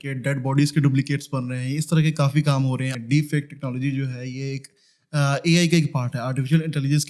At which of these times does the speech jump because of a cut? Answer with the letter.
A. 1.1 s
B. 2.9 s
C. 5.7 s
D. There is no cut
B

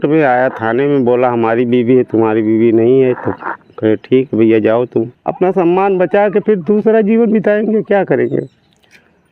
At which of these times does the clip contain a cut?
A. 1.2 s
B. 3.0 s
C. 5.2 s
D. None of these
C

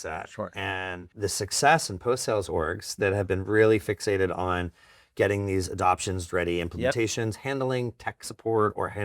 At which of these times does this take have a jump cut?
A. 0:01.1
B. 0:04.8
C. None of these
A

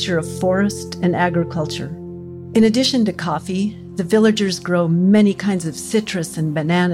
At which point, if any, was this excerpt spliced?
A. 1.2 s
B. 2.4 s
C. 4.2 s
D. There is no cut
D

